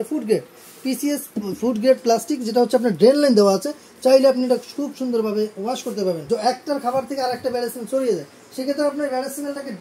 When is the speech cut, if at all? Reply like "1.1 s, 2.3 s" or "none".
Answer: 6.3 s